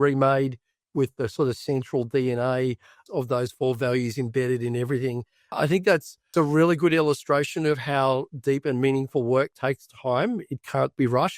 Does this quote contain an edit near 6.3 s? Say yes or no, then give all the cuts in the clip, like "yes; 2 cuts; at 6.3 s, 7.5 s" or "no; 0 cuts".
yes; 1 cut; at 6.3 s